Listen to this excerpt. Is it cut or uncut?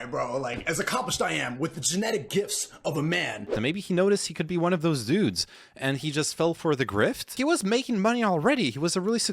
cut